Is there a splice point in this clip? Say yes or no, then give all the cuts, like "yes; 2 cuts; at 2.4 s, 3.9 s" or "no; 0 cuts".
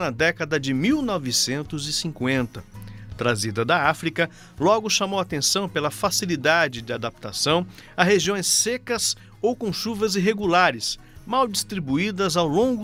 no; 0 cuts